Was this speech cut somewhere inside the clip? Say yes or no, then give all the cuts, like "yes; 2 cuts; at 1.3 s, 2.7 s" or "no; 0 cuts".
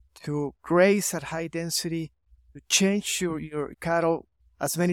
yes; 1 cut; at 3.7 s